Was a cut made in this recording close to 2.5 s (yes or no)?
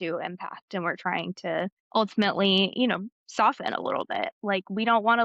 no